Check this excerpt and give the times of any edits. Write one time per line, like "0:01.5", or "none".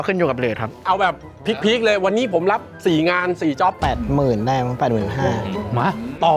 0:00.8
0:03.8
0:05.5